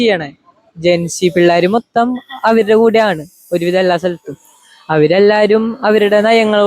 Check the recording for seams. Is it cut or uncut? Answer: uncut